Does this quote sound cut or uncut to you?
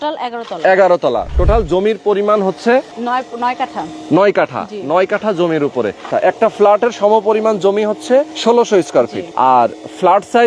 cut